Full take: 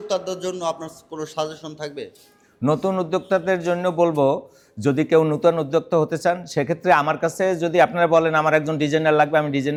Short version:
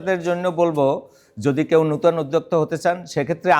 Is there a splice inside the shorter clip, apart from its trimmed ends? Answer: no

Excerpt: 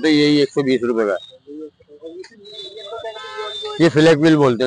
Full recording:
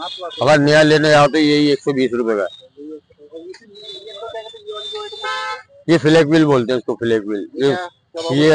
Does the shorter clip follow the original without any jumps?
no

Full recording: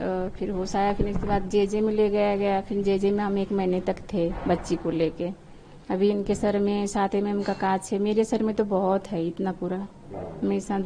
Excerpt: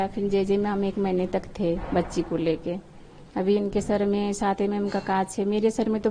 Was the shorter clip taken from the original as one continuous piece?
yes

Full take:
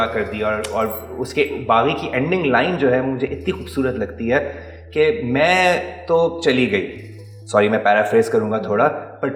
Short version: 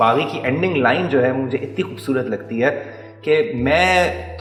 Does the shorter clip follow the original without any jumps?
yes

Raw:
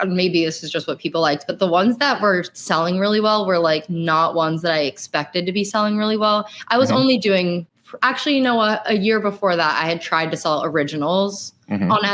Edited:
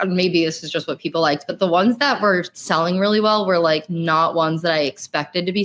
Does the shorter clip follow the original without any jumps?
yes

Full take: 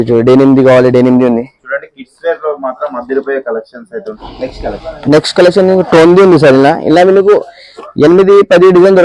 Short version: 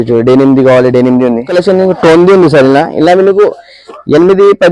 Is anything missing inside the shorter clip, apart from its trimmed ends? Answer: yes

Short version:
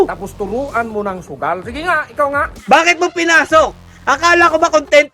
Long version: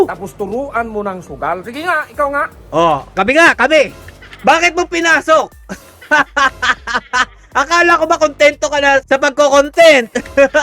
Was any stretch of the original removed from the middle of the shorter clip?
yes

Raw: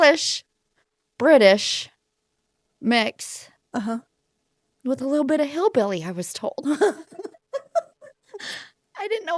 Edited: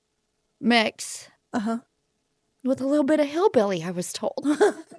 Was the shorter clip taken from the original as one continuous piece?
yes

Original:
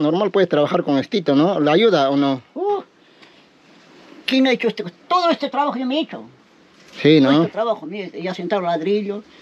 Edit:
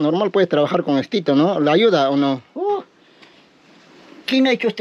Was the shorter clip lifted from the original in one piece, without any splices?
yes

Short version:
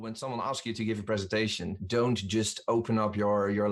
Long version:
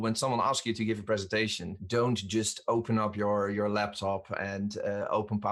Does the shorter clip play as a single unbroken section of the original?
yes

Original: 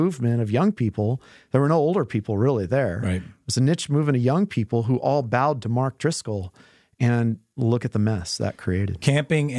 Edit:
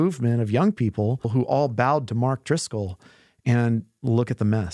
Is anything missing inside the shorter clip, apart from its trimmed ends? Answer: yes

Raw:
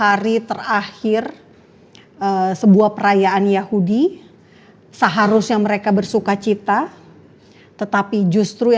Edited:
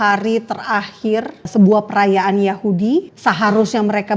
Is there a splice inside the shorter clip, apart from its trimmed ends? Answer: yes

